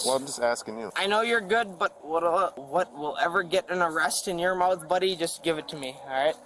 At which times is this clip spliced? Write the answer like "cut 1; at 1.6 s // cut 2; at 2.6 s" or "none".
cut 1; at 0.9 s // cut 2; at 2.6 s

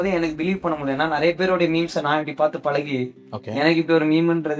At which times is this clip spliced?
none

